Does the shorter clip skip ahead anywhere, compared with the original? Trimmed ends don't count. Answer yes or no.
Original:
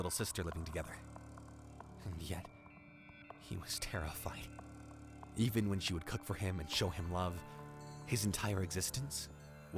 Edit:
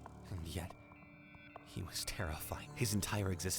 yes